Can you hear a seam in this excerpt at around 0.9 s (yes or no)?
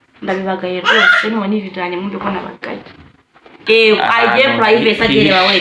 no